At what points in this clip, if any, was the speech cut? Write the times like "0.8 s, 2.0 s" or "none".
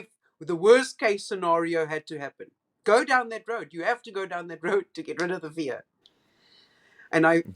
none